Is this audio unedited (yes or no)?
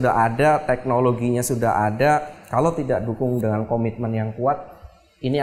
yes